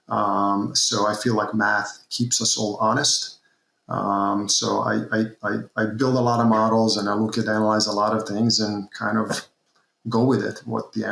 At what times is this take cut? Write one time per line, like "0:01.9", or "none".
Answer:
none